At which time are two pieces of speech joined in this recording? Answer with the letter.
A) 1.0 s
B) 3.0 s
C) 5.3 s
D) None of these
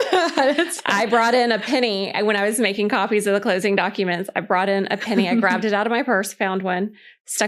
D